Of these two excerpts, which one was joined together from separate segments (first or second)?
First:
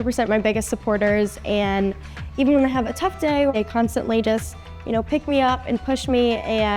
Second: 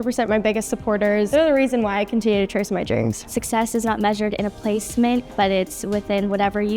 second